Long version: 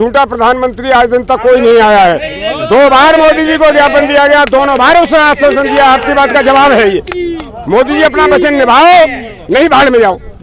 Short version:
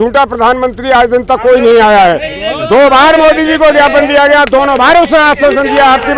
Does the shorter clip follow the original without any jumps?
yes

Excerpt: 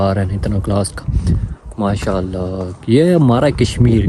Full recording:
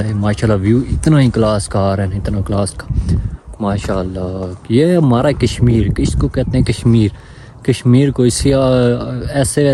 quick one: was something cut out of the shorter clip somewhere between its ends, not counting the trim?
no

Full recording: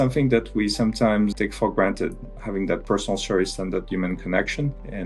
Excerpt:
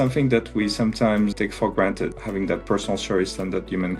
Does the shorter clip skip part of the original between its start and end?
yes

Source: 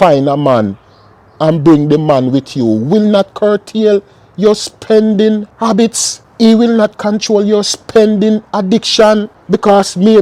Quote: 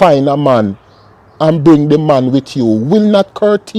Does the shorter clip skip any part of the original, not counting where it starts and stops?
no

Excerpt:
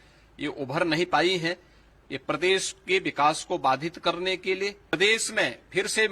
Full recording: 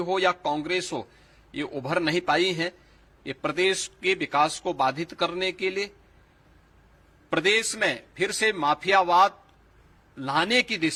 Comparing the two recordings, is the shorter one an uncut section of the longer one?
no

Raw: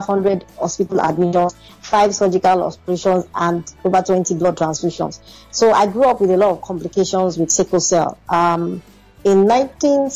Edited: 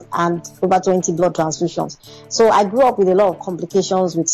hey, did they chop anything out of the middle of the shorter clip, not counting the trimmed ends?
no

